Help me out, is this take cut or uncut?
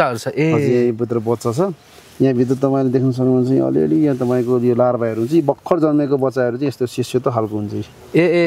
uncut